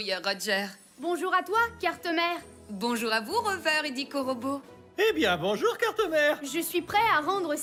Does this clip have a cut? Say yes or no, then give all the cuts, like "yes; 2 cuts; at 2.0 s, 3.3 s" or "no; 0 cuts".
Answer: no; 0 cuts